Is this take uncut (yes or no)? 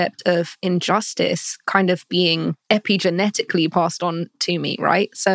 no